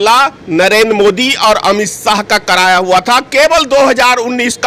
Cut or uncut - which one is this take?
uncut